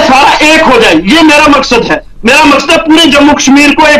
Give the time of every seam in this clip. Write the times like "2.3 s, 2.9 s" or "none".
none